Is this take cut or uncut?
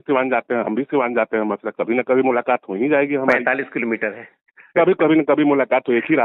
uncut